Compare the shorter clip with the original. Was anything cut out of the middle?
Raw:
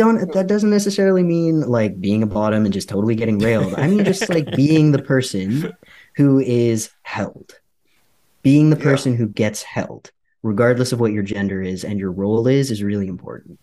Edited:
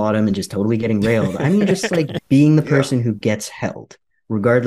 yes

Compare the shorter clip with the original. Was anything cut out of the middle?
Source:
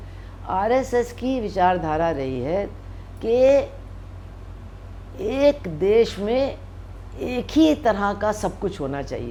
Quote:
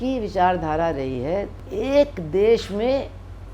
yes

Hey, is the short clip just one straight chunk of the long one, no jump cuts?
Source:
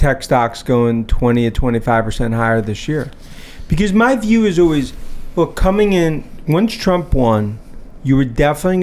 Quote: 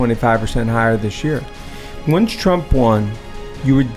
no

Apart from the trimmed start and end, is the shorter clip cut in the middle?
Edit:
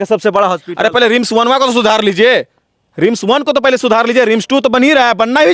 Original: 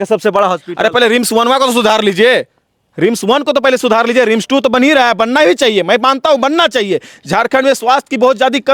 no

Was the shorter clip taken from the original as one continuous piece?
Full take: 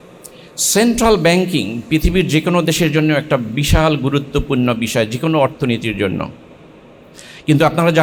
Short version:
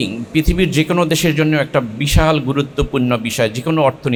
yes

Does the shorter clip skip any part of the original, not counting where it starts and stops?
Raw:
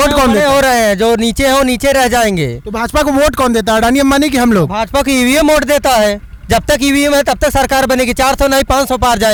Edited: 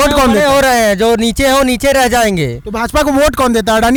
no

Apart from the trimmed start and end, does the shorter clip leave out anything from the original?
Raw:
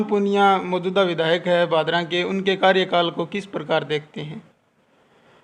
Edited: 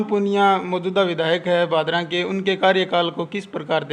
no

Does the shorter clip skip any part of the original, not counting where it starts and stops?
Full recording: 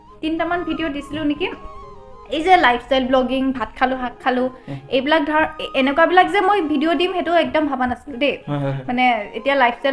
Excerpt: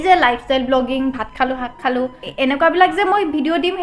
yes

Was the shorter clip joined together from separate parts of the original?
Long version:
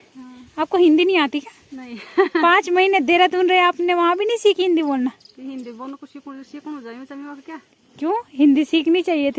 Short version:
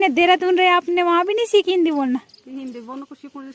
no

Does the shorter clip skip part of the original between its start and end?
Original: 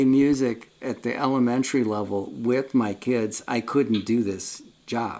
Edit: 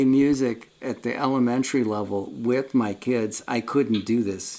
no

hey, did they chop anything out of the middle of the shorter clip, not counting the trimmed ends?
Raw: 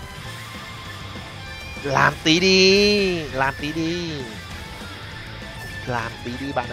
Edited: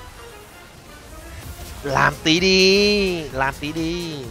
no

